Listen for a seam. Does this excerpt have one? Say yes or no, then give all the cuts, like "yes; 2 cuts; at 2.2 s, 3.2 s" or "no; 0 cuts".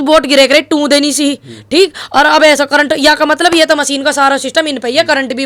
no; 0 cuts